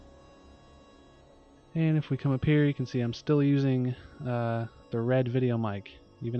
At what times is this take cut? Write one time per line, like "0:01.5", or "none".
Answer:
0:03.8